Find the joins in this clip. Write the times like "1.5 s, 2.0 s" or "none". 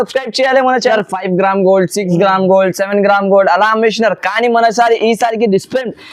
0.9 s